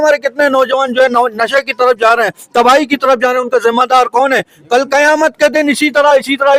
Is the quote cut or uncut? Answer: uncut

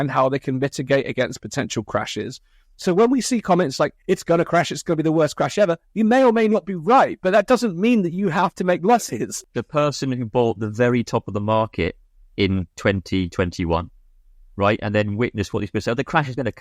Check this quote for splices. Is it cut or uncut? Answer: cut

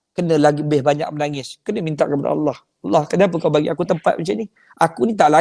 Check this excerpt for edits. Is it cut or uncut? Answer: uncut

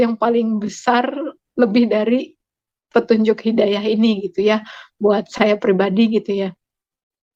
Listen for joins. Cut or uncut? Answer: uncut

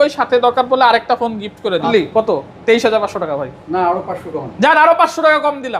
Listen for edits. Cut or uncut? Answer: cut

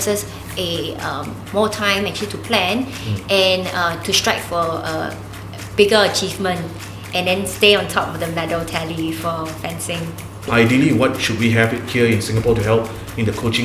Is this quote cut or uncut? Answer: cut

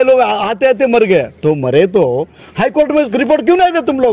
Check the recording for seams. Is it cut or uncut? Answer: cut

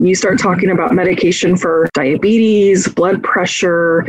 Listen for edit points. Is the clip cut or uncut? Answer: cut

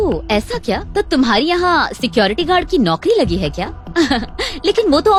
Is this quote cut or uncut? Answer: uncut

